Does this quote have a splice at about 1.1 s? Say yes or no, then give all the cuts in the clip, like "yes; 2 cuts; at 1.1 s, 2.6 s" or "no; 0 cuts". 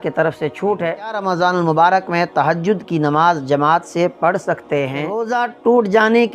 yes; 2 cuts; at 1.1 s, 5.2 s